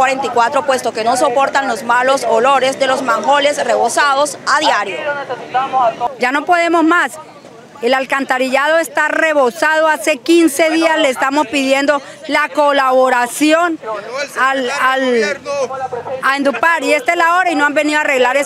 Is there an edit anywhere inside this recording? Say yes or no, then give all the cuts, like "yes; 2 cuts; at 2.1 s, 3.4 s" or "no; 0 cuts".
no; 0 cuts